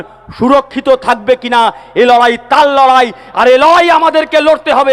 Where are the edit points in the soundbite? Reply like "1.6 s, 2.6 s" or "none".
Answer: none